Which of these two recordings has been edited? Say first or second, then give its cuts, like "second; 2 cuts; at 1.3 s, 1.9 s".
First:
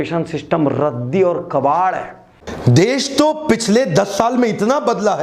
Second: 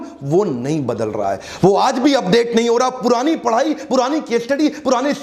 first; 1 cut; at 2.4 s